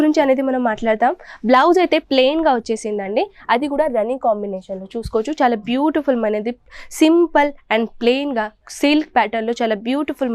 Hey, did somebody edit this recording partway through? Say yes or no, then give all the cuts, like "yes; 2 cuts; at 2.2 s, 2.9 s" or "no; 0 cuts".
no; 0 cuts